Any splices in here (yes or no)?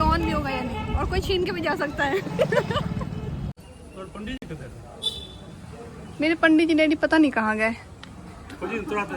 yes